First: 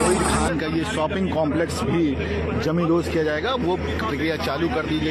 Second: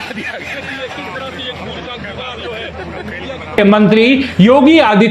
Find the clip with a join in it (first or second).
second